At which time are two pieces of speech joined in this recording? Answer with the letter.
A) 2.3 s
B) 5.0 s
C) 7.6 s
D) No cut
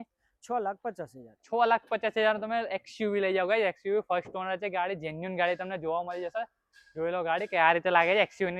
D